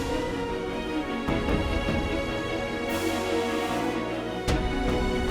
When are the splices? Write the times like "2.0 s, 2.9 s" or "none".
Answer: none